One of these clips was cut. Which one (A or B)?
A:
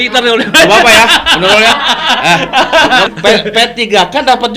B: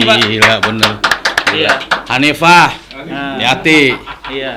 A